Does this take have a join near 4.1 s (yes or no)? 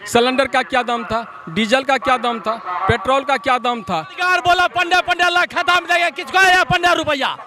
yes